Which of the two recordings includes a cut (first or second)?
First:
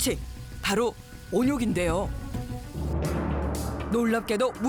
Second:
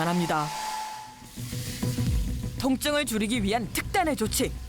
second